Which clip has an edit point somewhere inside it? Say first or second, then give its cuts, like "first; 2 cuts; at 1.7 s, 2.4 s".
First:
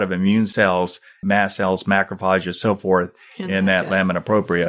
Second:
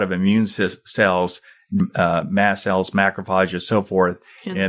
first; 1 cut; at 1.0 s